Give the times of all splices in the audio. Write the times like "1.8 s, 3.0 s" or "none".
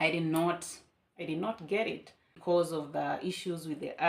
2.3 s